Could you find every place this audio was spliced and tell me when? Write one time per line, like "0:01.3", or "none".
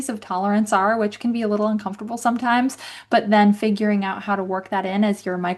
none